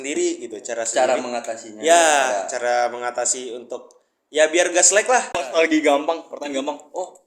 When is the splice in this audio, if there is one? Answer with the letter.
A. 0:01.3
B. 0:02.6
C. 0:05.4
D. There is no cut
C